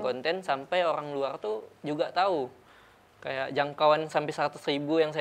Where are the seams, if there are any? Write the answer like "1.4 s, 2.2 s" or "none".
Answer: none

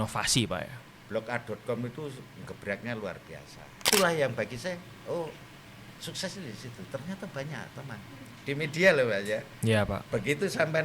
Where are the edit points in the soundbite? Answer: 3.9 s

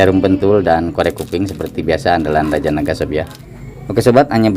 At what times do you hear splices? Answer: 3.4 s

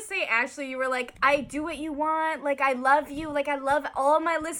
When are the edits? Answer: none

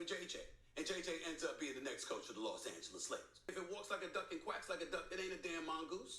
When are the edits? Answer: 3.4 s

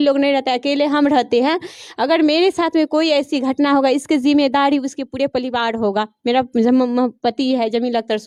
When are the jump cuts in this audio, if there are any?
none

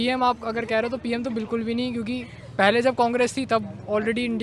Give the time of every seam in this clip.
none

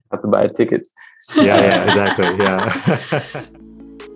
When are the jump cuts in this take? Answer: 3.3 s

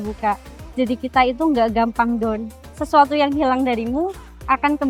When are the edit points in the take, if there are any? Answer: 2.5 s

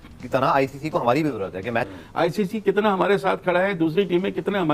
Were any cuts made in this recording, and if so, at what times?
2.0 s

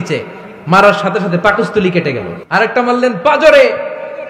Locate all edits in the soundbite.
2.4 s

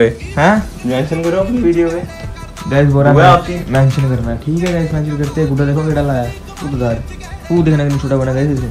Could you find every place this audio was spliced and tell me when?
2.5 s, 7.5 s

